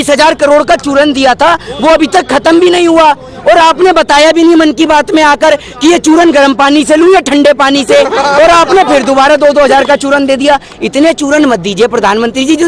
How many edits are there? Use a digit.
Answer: 0